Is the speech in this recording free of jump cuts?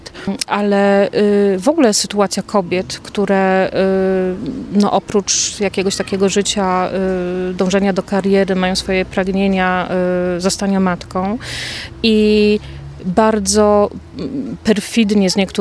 yes; 0 cuts

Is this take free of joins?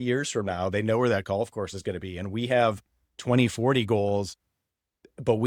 yes; 0 cuts

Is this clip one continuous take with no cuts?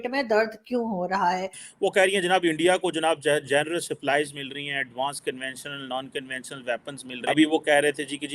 no; 2 cuts; at 1.6 s, 7.1 s

